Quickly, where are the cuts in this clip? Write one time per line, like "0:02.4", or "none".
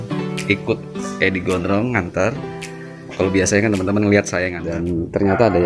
0:04.6